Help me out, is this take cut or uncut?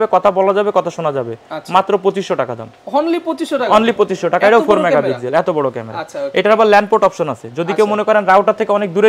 uncut